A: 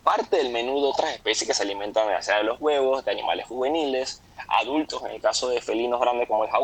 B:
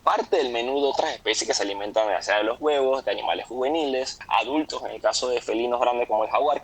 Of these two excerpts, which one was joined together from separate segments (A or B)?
B